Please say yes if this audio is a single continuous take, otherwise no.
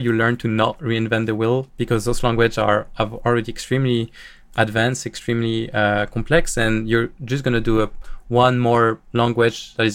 yes